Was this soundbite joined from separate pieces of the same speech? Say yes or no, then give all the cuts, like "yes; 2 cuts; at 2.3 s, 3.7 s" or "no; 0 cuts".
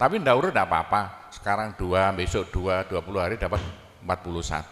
no; 0 cuts